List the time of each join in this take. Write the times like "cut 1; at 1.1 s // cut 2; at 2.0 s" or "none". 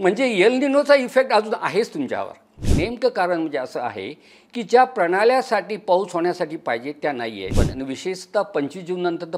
cut 1; at 2.6 s // cut 2; at 7.5 s